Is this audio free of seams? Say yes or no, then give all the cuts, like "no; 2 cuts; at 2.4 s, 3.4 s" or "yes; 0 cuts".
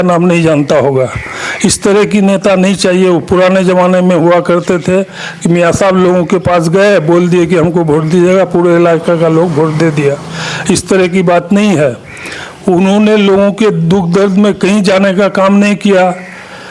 yes; 0 cuts